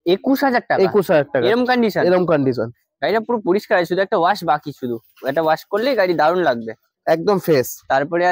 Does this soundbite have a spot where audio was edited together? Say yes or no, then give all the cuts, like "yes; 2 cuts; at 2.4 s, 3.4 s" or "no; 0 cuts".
no; 0 cuts